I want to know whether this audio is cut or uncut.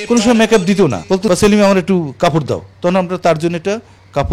cut